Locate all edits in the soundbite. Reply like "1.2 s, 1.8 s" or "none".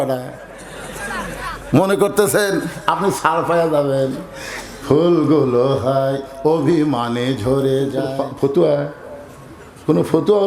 8.2 s